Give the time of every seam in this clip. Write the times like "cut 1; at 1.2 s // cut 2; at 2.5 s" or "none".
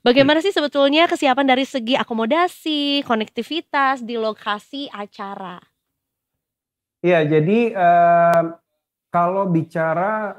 none